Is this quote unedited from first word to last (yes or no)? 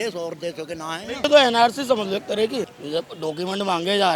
no